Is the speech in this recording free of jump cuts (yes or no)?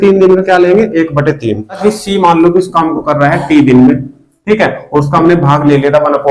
no